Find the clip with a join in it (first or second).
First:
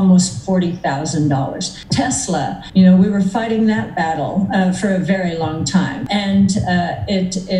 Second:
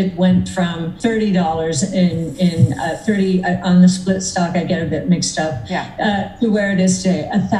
first